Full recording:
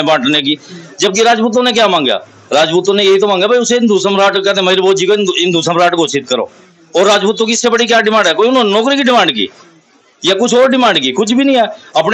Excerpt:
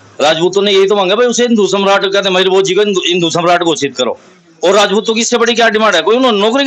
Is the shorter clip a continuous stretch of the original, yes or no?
yes